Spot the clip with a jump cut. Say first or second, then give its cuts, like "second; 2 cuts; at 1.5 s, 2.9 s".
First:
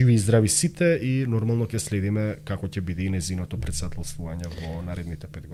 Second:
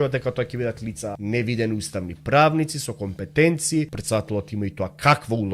second; 2 cuts; at 1.1 s, 4.0 s